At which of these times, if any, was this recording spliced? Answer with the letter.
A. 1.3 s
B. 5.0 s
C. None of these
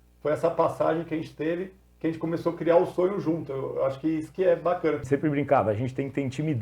B